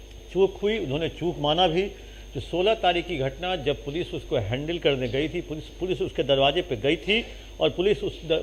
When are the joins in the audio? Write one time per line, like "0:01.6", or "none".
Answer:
none